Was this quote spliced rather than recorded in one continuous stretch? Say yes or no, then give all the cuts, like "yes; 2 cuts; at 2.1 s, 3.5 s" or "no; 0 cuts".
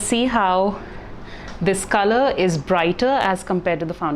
no; 0 cuts